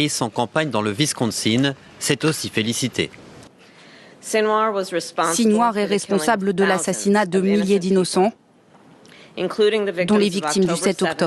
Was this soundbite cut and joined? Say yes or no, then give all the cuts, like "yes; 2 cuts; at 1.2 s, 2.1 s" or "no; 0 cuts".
no; 0 cuts